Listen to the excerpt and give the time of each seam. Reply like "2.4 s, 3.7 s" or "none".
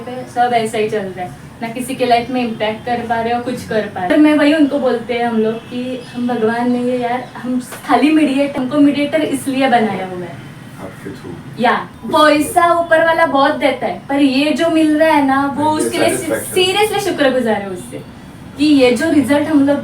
4.1 s, 8.6 s, 11.9 s